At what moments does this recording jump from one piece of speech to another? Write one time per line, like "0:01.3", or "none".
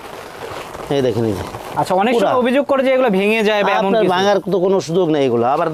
none